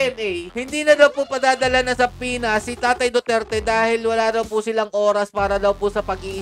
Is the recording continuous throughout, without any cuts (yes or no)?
yes